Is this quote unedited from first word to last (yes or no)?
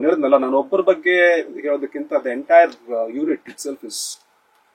yes